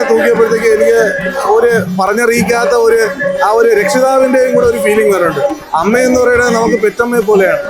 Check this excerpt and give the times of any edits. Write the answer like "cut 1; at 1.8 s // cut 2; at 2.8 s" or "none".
none